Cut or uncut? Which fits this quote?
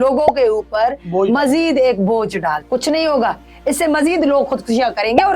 cut